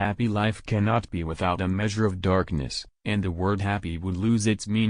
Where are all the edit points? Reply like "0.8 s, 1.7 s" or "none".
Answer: none